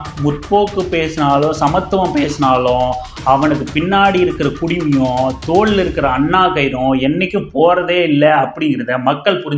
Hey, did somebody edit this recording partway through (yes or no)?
no